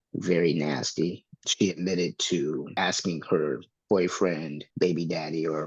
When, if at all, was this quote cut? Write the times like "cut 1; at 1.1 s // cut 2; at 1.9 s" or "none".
cut 1; at 1.3 s // cut 2; at 2.7 s // cut 3; at 4.6 s